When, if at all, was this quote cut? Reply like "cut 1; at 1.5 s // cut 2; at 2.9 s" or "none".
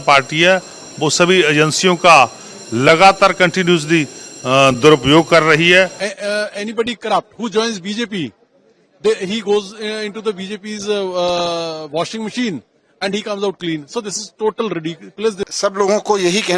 cut 1; at 6.1 s // cut 2; at 15.5 s